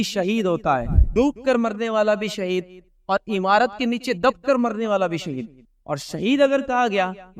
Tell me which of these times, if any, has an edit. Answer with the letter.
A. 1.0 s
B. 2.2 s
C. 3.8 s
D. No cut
A